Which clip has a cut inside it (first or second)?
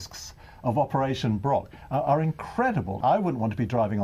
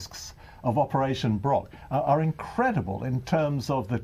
first